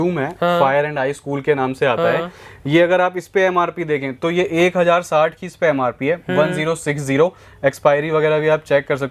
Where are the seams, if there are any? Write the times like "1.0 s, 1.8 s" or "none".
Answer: none